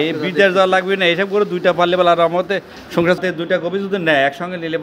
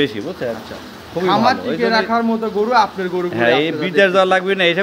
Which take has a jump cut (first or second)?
first